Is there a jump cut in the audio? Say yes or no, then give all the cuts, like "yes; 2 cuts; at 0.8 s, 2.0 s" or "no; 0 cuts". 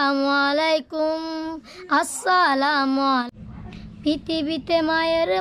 yes; 1 cut; at 3.3 s